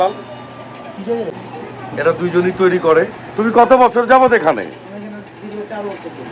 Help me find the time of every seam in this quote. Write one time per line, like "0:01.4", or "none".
0:01.5